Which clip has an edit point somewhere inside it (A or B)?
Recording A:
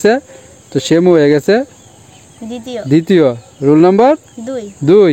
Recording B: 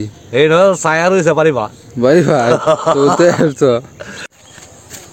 B